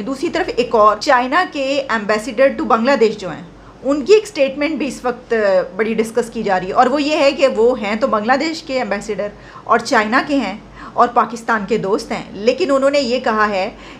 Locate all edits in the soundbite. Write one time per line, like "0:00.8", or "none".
0:01.0